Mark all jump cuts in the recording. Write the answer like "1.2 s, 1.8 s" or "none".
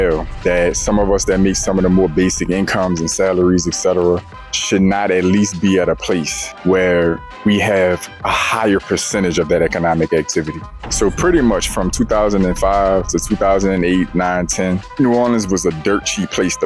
10.8 s